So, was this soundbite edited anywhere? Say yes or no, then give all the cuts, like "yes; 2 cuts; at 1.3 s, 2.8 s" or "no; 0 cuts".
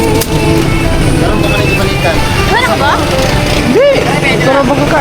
no; 0 cuts